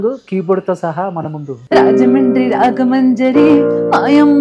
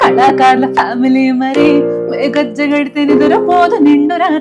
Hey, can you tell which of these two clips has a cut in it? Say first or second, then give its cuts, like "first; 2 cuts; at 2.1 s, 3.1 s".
first; 1 cut; at 1.5 s